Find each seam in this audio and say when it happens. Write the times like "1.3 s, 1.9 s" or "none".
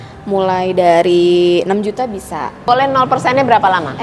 2.7 s